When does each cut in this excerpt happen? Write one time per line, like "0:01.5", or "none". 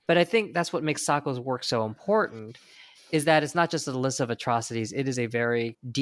none